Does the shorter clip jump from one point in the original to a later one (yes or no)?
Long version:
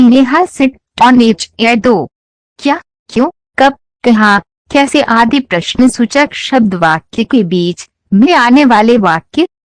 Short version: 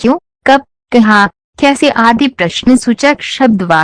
no